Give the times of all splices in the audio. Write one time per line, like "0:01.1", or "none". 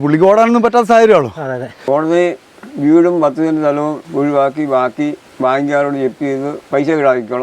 0:01.7
0:04.0
0:05.2
0:06.6